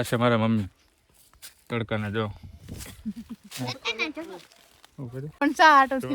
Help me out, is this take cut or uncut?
uncut